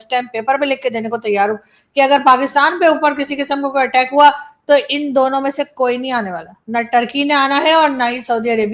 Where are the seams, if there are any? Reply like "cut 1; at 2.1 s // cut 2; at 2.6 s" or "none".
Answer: none